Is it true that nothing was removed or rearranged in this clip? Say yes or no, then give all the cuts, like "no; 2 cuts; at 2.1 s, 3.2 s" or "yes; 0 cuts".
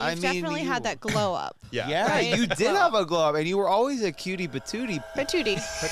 no; 1 cut; at 5.0 s